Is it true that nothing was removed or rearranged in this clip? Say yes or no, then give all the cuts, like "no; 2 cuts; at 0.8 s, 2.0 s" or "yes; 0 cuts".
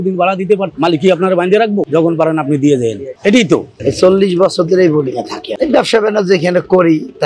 no; 2 cuts; at 1.9 s, 3.7 s